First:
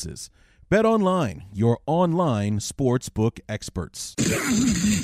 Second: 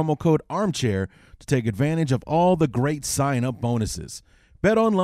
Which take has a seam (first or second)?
first